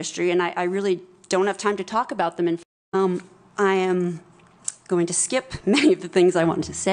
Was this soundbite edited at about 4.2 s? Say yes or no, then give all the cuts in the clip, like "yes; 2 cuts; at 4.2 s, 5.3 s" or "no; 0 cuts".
no; 1 cut; at 2.6 s